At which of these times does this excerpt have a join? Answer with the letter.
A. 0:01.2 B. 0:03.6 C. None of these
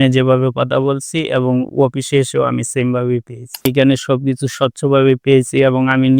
B